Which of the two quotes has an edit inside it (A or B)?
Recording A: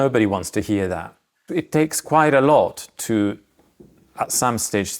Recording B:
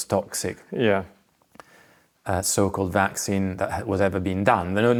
A